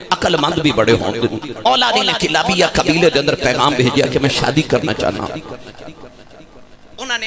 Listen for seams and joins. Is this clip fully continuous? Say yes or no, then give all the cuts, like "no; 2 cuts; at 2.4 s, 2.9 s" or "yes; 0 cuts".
no; 1 cut; at 1.5 s